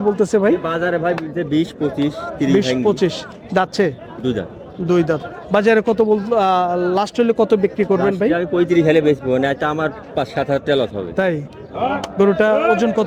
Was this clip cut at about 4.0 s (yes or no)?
no